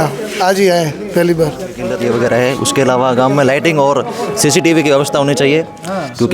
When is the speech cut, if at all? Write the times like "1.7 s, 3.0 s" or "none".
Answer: 2.0 s